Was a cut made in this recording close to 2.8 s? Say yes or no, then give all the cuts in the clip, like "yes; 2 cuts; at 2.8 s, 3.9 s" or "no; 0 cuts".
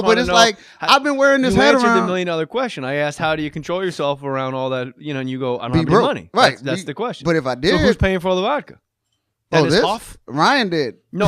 no; 1 cut; at 8.2 s